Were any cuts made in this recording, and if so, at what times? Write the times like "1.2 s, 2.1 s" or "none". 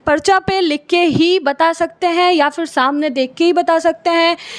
none